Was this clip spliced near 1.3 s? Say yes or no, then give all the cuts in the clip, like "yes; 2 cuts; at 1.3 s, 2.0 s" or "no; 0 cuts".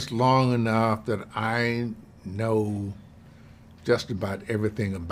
no; 0 cuts